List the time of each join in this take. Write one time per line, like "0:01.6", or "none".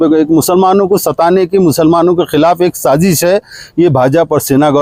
none